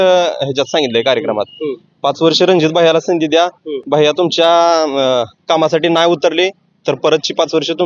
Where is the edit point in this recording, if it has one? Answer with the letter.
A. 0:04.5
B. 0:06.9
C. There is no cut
C